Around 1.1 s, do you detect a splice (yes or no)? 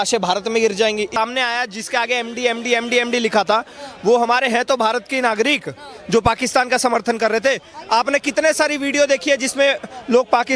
yes